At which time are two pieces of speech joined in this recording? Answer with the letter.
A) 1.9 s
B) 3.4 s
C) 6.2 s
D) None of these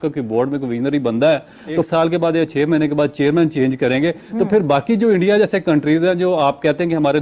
A